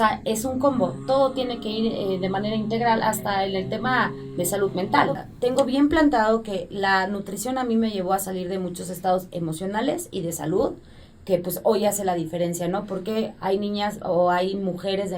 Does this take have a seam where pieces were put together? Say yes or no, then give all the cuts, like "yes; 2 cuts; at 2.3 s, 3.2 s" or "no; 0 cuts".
yes; 1 cut; at 5.3 s